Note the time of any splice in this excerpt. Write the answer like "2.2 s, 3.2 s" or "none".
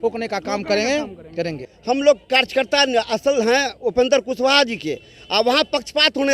1.7 s